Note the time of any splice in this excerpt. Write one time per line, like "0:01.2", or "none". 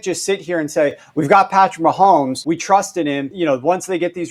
0:02.4
0:03.3